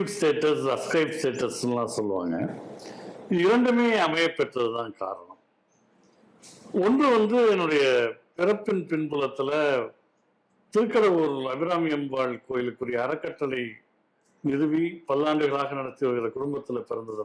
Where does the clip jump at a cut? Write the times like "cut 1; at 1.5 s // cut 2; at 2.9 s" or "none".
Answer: none